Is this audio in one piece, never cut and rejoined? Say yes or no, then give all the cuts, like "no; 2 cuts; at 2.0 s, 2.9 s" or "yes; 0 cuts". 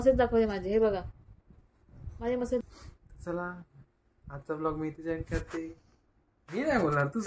no; 1 cut; at 2.6 s